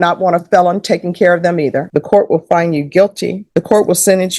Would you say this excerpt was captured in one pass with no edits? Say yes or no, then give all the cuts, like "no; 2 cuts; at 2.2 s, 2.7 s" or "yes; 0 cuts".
no; 2 cuts; at 1.9 s, 3.4 s